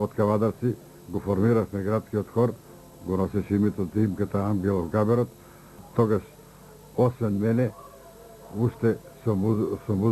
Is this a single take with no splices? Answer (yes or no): no